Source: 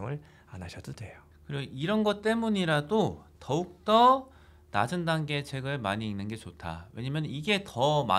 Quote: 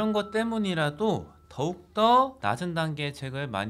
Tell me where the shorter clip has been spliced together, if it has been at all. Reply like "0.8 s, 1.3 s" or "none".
2.4 s